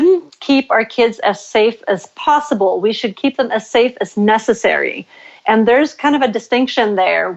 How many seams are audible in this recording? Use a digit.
0